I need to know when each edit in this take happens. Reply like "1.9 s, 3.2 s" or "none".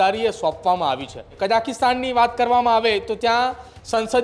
1.2 s